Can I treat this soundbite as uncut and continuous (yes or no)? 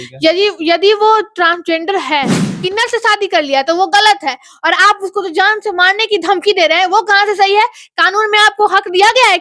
no